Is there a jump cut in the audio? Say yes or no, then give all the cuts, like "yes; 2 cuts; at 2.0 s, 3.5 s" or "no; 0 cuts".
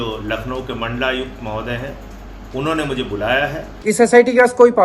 yes; 1 cut; at 3.7 s